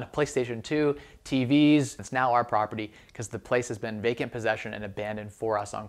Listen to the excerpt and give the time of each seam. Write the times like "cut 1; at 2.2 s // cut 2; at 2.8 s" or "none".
cut 1; at 2.0 s